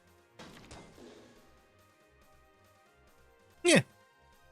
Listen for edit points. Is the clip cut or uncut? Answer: cut